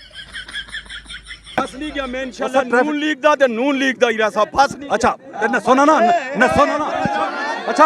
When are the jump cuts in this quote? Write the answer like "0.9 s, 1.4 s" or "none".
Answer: 1.5 s